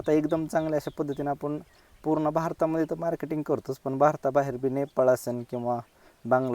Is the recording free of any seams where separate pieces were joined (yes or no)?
yes